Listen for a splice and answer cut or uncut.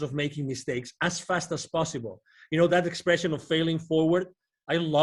uncut